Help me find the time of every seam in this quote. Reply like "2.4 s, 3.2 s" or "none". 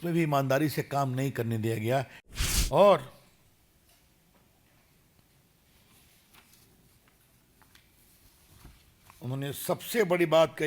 2.2 s